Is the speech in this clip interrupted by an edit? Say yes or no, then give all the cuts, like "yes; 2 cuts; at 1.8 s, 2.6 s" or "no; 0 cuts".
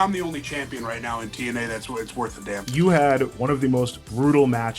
yes; 2 cuts; at 2.7 s, 3.9 s